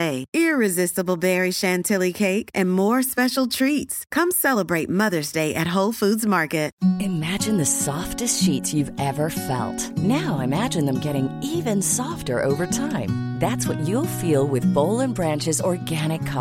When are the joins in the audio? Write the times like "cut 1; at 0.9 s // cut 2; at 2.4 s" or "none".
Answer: cut 1; at 6.7 s